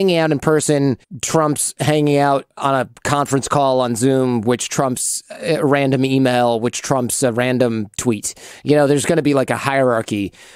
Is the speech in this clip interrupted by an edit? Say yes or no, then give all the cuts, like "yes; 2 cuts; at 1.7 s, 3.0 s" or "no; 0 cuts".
yes; 2 cuts; at 1.1 s, 2.6 s